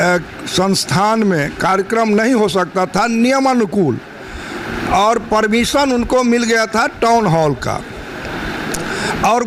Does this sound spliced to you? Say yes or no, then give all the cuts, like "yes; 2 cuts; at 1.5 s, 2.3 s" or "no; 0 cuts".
no; 0 cuts